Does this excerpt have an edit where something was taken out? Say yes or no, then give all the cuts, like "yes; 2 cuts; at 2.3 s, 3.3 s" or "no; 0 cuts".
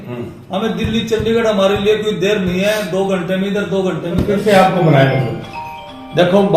yes; 1 cut; at 4.3 s